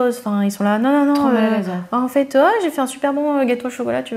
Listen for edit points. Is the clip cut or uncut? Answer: uncut